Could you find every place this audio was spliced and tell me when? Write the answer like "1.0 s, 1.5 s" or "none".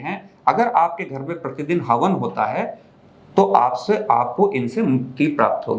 none

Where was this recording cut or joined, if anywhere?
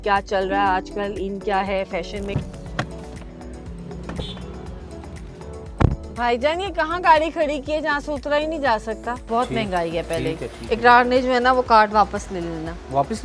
2.3 s, 9.2 s

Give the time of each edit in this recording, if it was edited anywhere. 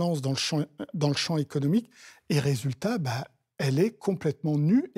none

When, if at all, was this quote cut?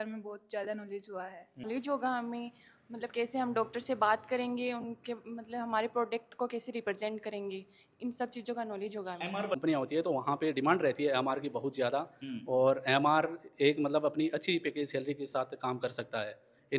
1.7 s, 9.6 s

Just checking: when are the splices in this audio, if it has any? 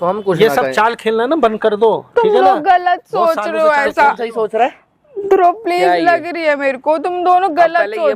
none

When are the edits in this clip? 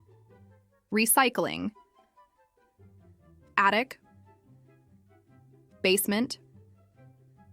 0.9 s, 1.7 s, 3.5 s, 4.2 s, 5.8 s

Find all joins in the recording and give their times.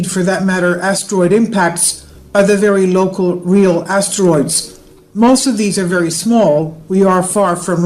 3.9 s

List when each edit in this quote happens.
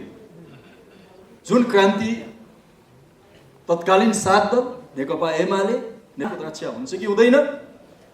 6.3 s

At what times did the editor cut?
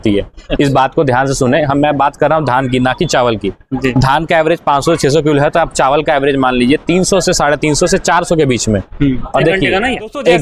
none

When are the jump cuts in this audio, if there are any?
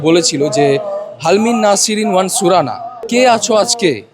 2.9 s

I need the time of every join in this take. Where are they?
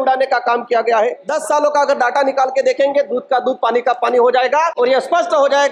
1.2 s, 4.7 s

